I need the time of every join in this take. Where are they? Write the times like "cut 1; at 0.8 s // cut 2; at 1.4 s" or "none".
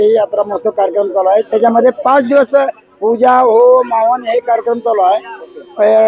none